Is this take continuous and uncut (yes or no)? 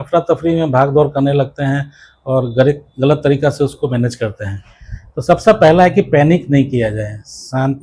yes